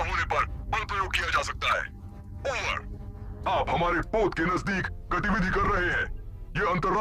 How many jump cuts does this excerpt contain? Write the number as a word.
one